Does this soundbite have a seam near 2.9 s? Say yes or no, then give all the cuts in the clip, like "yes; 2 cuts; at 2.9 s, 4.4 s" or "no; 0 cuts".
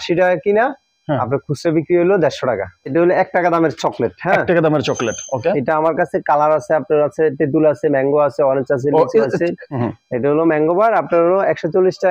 yes; 2 cuts; at 2.9 s, 9.2 s